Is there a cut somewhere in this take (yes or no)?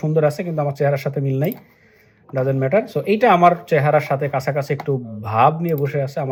no